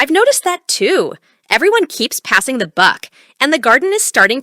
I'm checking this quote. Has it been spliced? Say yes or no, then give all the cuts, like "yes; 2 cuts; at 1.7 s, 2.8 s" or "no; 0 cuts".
yes; 1 cut; at 1.5 s